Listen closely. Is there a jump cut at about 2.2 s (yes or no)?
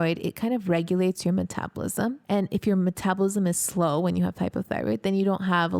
yes